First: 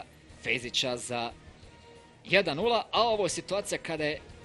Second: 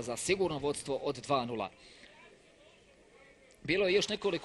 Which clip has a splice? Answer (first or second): second